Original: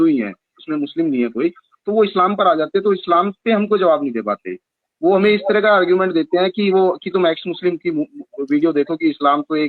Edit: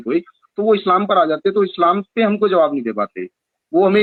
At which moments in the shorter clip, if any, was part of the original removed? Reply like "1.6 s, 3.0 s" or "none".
none